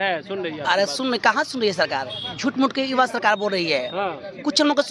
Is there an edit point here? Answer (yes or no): no